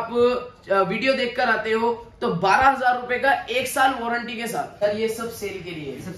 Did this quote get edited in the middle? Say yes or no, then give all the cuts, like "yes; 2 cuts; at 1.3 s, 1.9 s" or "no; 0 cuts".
yes; 1 cut; at 4.8 s